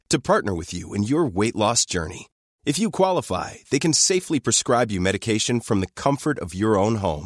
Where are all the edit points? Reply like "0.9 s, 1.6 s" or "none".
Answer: none